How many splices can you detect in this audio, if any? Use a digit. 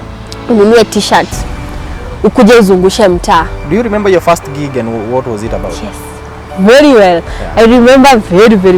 1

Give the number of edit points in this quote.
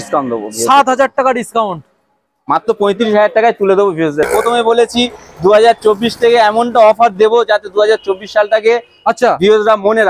1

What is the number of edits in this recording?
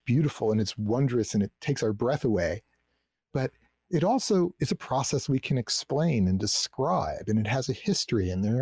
0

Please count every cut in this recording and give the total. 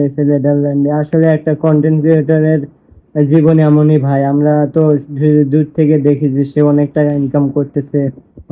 0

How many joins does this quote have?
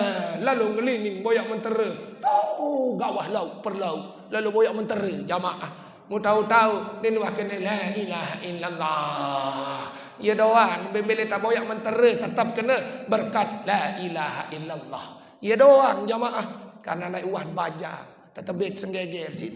0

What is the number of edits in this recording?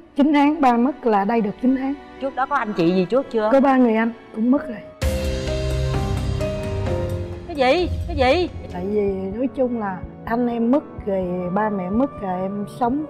1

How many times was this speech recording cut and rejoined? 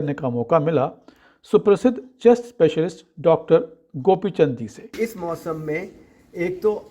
1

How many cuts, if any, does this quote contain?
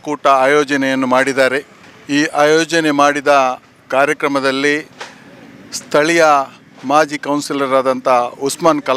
0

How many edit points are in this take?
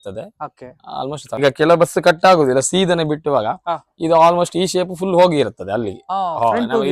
1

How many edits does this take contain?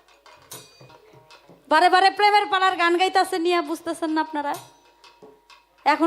1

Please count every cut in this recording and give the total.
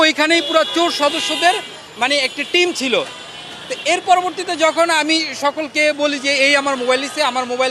0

